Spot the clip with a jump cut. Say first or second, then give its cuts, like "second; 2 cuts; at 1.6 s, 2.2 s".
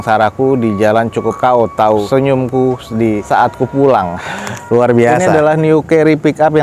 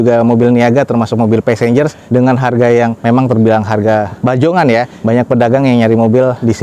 first; 1 cut; at 5.2 s